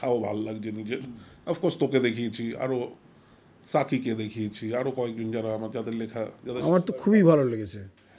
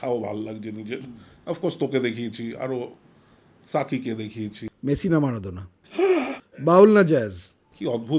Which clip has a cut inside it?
second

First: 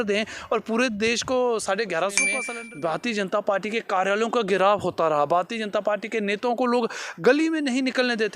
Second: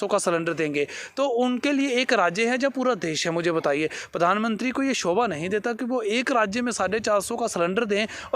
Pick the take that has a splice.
first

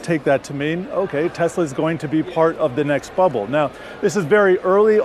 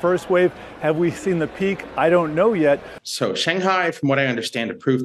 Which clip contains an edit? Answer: second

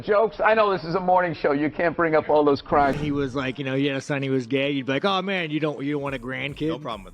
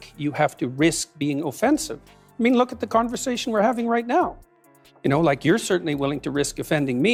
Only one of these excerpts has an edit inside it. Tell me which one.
first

